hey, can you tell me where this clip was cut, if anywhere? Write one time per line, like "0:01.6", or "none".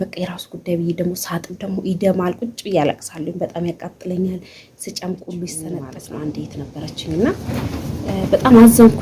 0:05.9